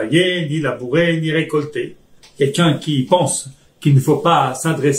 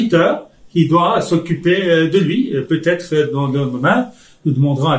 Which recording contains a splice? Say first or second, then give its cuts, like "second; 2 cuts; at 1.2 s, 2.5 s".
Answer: first; 1 cut; at 2.2 s